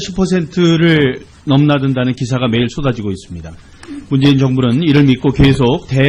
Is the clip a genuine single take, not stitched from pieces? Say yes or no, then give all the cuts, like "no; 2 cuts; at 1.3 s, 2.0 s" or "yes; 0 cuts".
yes; 0 cuts